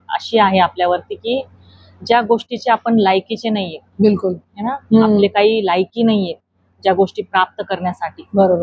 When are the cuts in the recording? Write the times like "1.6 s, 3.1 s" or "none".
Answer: none

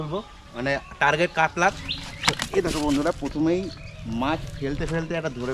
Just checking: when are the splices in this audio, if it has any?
1.9 s

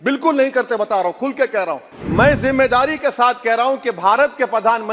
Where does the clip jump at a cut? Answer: 1.9 s

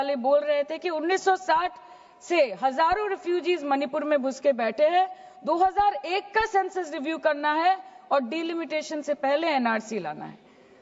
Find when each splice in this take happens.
none

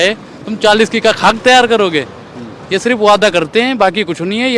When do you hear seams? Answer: none

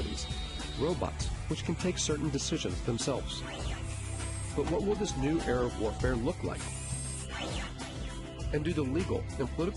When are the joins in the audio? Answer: 4.4 s

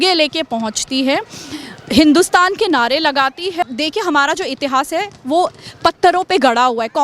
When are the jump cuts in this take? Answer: 3.6 s

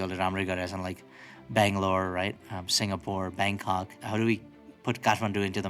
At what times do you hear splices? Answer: 4.0 s, 4.7 s

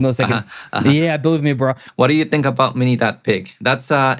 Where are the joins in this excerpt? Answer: 1.8 s

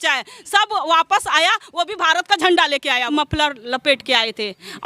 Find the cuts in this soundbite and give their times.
3.0 s

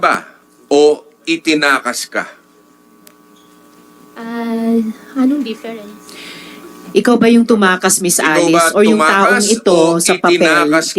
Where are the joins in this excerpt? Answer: none

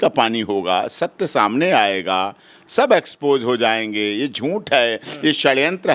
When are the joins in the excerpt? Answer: none

